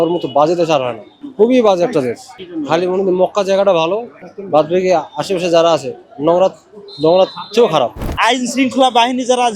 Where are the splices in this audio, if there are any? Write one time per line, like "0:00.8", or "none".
0:08.1